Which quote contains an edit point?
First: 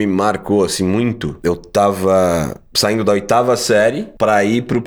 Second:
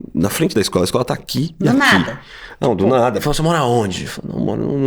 second; 1 cut; at 3.2 s

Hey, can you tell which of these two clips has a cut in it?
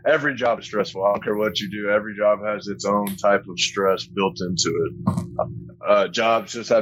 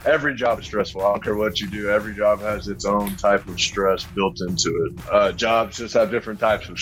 second; 1 cut; at 5.0 s

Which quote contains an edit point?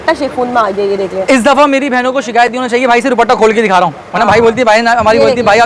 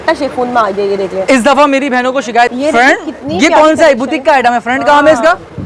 second; 1 cut; at 2.5 s

